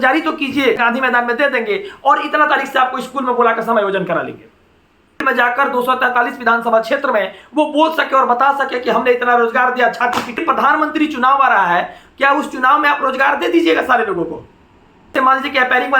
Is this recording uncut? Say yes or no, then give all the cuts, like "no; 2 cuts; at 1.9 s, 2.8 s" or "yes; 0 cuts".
no; 4 cuts; at 0.8 s, 5.2 s, 10.4 s, 15.1 s